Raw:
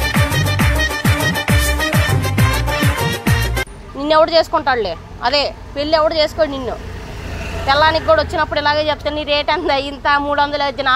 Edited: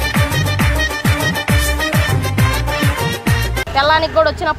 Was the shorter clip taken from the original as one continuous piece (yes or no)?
no